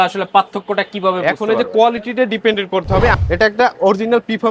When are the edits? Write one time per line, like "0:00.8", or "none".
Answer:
0:03.2